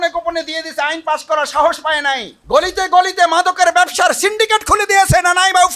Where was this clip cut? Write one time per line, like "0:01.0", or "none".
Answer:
0:02.3

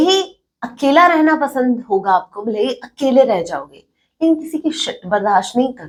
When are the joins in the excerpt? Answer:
none

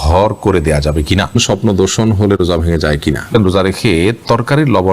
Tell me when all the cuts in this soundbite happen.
0:01.4
0:03.3

